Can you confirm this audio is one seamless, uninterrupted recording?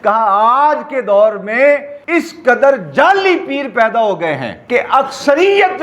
no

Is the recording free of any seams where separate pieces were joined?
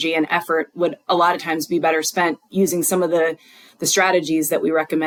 yes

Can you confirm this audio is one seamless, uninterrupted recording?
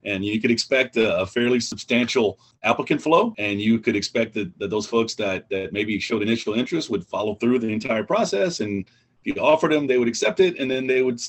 no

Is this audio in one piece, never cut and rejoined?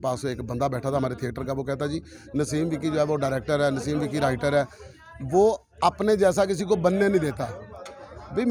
yes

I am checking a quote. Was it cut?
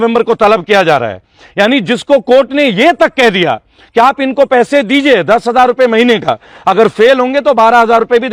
no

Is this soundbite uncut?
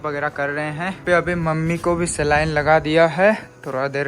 no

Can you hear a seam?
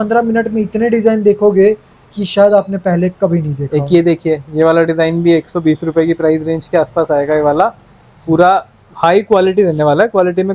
no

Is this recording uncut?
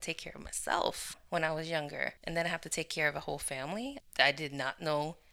no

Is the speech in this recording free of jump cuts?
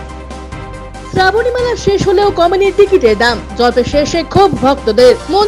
no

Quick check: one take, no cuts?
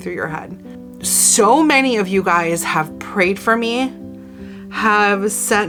yes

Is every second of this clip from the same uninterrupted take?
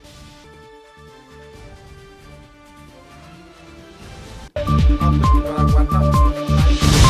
yes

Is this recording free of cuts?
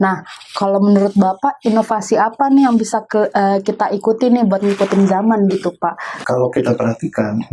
no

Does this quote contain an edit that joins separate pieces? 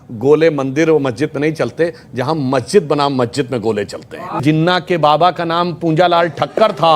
yes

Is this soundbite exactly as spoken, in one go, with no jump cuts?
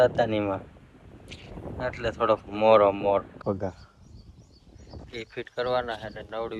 no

